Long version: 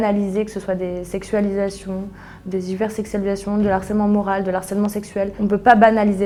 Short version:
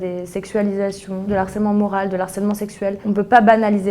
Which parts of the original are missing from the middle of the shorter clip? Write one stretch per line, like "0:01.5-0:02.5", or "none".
0:02.1-0:03.6